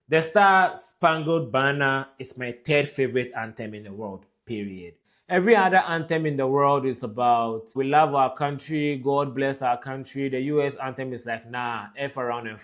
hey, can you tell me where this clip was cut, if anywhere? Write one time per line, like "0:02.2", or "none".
0:05.1
0:07.7